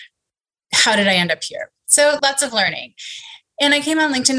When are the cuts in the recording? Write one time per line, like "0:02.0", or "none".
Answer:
0:02.2